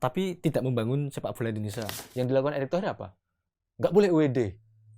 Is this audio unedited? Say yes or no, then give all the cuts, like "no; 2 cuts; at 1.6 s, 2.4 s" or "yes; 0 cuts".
no; 1 cut; at 2.0 s